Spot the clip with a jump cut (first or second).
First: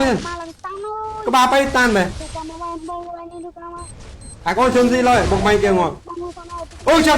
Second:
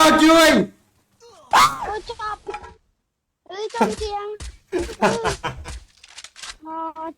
second